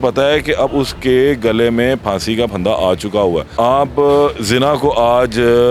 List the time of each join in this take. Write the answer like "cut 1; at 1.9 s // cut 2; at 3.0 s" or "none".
cut 1; at 3.5 s